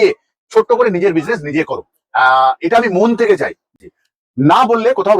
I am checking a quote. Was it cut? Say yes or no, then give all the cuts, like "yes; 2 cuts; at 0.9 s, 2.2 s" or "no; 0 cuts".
yes; 1 cut; at 3.8 s